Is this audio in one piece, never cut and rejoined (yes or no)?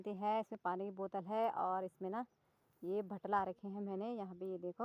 yes